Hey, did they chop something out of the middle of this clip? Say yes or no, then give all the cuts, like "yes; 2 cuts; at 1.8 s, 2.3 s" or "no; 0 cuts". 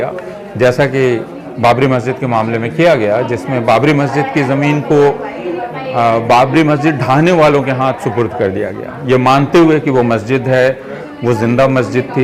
no; 0 cuts